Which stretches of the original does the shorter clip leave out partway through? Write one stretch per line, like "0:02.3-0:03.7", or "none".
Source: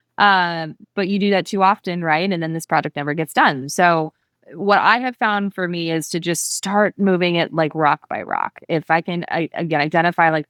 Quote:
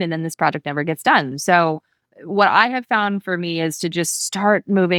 none